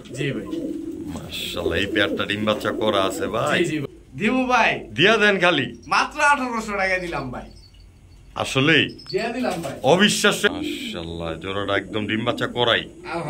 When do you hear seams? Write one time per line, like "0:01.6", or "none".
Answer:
0:03.8
0:10.5